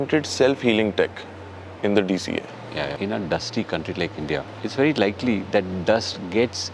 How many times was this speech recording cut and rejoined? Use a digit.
2